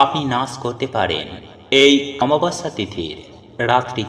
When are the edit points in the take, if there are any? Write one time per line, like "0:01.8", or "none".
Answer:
0:02.2